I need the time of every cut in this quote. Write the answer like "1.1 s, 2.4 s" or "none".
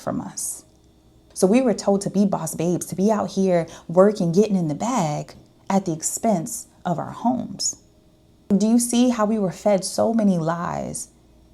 1.2 s